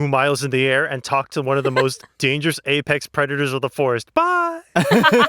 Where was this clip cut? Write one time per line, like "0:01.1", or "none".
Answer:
0:02.1